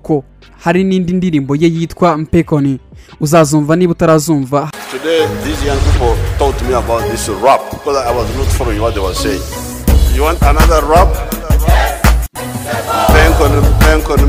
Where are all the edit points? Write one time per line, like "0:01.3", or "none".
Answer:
0:12.3